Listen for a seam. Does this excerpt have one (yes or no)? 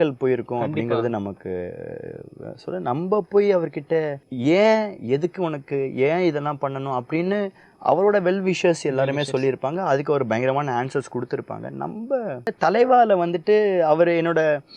yes